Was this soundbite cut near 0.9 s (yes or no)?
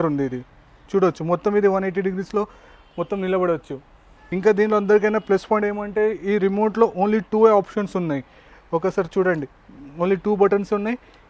no